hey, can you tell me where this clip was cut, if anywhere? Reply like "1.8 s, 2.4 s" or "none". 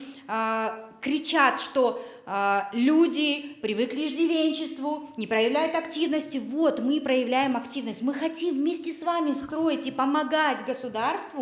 none